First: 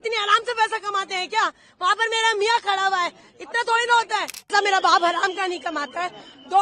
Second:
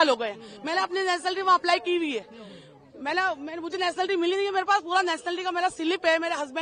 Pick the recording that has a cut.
first; 1 cut; at 4.5 s

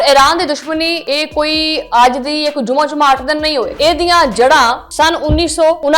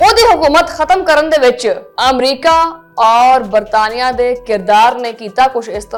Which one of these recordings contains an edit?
first; 2 cuts; at 1.0 s, 3.7 s

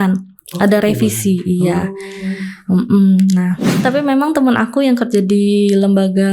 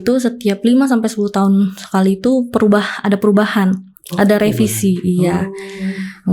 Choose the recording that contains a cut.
first; 1 cut; at 3.7 s

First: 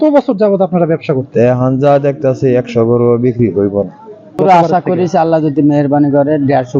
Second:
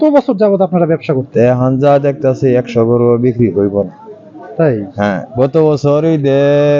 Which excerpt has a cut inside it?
first; 1 cut; at 4.4 s

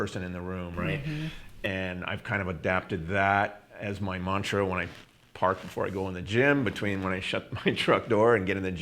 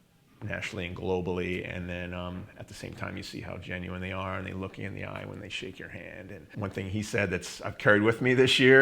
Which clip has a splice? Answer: second; 1 cut; at 6.4 s

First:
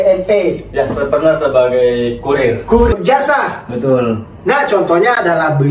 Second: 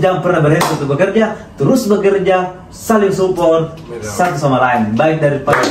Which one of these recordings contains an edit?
first; 1 cut; at 2.9 s

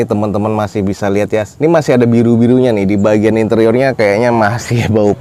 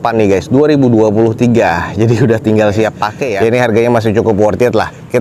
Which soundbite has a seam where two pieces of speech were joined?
second; 1 cut; at 3.3 s

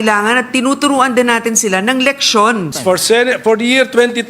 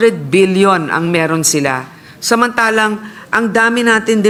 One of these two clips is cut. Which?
first; 1 cut; at 2.7 s

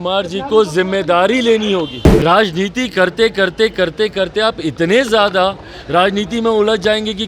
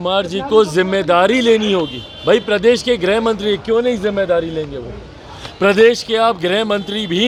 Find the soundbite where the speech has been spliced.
first; 1 cut; at 2.0 s

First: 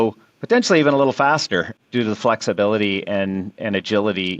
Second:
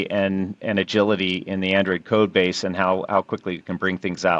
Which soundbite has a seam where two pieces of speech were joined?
first; 1 cut; at 1.7 s

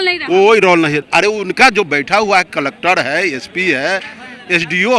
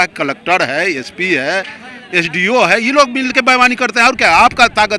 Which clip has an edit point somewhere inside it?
first; 1 cut; at 1.0 s

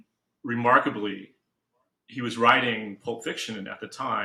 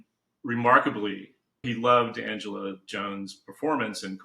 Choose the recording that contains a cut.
second; 1 cut; at 1.6 s

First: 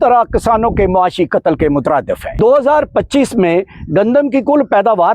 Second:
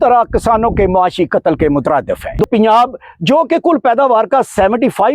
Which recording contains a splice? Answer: second; 1 cut; at 2.4 s

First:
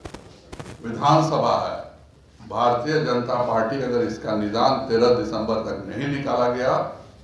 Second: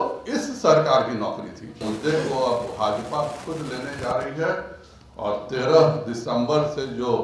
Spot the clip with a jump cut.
second; 1 cut; at 1.8 s

